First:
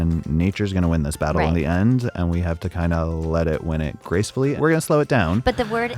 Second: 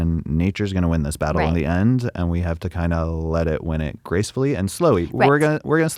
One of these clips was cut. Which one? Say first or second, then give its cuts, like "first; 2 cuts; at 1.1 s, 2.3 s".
first; 1 cut; at 4.5 s